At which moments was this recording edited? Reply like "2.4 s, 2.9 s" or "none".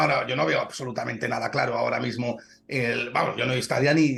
none